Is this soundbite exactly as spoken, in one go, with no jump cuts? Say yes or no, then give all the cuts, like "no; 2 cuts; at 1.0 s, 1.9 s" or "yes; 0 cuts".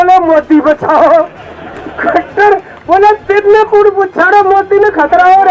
yes; 0 cuts